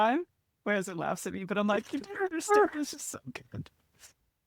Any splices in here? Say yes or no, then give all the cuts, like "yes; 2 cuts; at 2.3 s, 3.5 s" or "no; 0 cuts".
no; 0 cuts